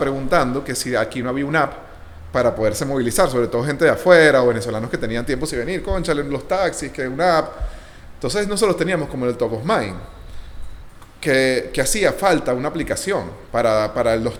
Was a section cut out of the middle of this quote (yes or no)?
no